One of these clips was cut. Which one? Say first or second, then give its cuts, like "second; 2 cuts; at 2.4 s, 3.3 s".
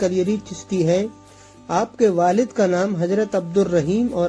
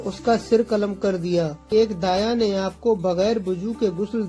second; 1 cut; at 1.7 s